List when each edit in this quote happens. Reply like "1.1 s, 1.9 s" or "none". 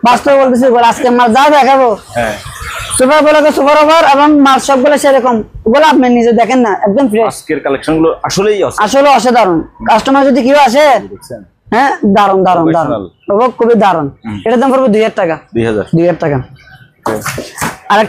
none